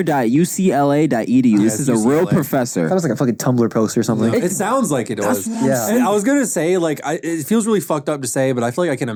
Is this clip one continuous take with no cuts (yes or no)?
yes